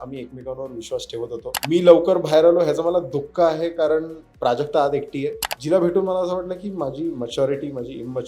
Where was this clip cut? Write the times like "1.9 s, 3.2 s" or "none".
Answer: 1.5 s, 5.5 s